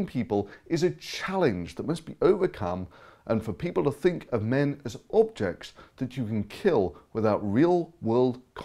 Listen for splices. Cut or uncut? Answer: uncut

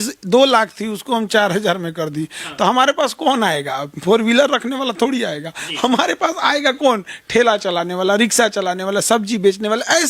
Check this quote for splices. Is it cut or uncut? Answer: uncut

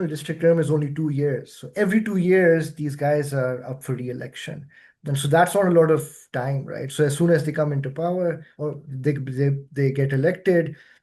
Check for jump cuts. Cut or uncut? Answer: uncut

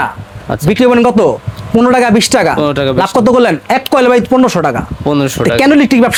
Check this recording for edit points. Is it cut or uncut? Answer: uncut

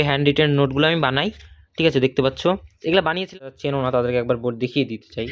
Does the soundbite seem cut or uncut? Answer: cut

